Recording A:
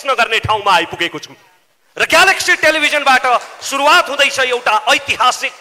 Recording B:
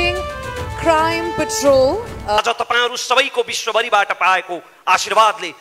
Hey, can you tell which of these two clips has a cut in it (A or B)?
B